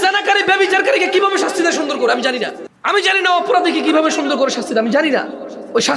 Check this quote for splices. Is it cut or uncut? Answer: cut